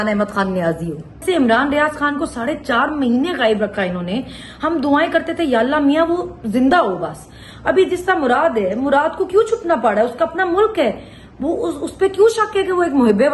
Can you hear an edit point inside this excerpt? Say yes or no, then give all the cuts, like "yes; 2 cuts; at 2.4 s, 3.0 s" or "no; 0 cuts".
yes; 1 cut; at 1.2 s